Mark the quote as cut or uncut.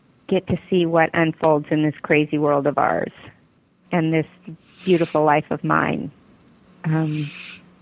cut